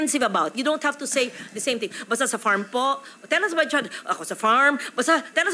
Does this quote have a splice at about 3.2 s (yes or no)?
no